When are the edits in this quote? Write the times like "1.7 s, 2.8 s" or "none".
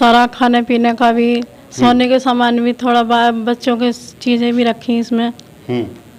none

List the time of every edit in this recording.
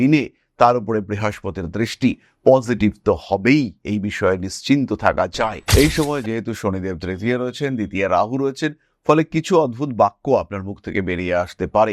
5.6 s

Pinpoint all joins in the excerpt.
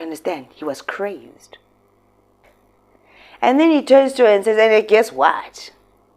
2.4 s

